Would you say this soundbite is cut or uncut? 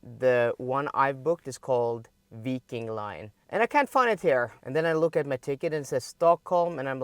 cut